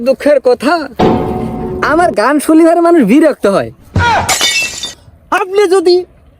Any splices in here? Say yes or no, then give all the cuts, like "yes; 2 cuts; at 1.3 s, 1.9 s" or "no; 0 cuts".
yes; 1 cut; at 5.1 s